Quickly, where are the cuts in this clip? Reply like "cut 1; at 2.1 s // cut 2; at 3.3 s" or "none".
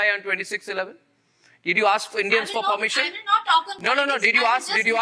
none